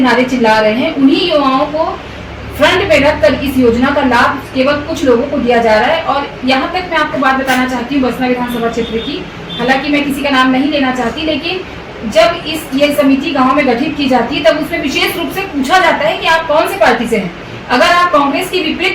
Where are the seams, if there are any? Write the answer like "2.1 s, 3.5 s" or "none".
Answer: none